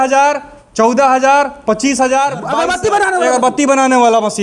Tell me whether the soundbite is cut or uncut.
cut